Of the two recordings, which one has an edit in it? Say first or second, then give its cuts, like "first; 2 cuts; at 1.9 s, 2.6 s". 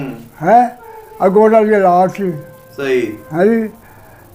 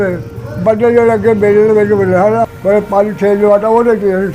second; 1 cut; at 2.5 s